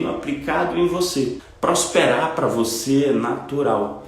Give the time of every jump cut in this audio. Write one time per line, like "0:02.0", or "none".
0:01.4